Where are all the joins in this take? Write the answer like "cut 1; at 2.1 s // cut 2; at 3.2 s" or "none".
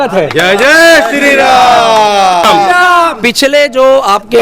cut 1; at 2.4 s